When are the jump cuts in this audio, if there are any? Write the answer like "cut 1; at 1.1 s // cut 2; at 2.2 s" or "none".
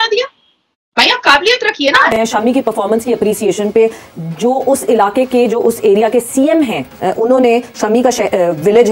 none